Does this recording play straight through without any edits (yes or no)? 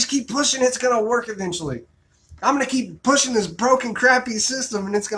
no